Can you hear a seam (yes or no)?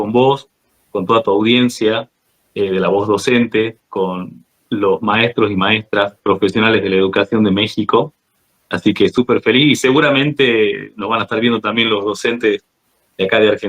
no